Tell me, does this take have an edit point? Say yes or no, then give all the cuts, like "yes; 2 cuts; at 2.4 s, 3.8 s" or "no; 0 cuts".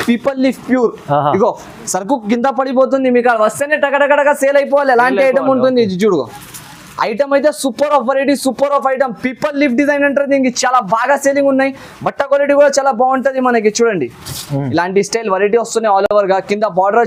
no; 0 cuts